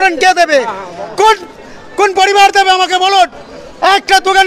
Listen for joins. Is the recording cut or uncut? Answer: uncut